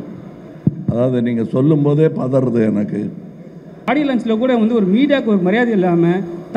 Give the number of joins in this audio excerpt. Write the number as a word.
one